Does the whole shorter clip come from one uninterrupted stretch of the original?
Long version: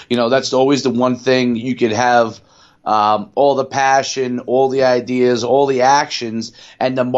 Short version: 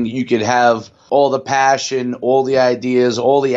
no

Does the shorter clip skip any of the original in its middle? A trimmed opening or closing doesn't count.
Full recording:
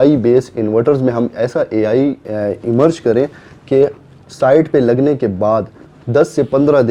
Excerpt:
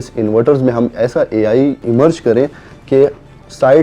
yes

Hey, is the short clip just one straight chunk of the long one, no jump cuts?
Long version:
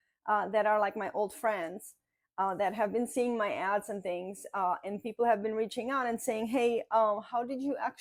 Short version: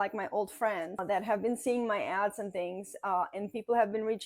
no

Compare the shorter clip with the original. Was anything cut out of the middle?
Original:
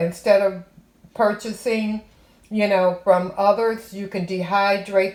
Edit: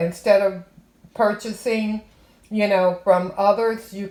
no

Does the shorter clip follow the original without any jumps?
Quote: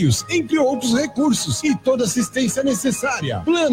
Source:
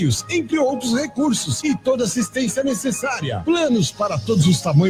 yes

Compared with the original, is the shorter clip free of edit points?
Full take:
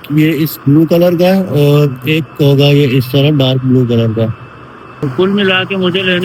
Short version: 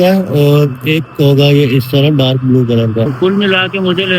no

